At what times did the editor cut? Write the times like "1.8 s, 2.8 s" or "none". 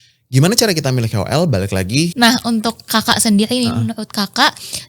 2.1 s